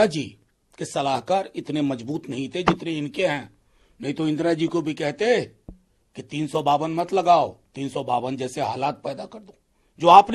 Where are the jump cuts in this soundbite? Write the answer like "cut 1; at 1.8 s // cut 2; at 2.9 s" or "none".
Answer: none